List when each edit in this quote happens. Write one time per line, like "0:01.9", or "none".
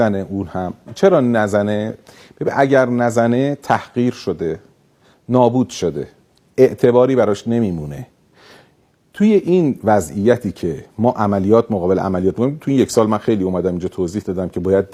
none